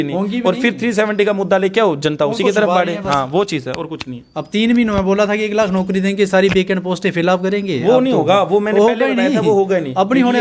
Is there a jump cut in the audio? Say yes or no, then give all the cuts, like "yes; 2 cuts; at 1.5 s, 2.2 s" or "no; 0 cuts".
no; 0 cuts